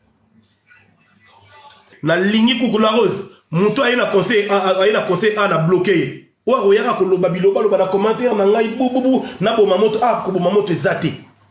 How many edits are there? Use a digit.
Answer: 1